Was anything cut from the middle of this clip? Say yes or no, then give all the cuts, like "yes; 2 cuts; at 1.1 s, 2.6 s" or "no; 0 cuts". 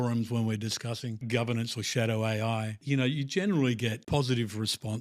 yes; 3 cuts; at 1.2 s, 2.8 s, 4.0 s